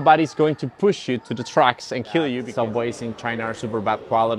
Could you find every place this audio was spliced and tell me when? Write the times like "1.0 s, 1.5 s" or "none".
2.4 s